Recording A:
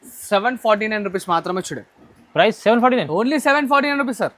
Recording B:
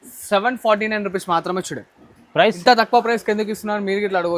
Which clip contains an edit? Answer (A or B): B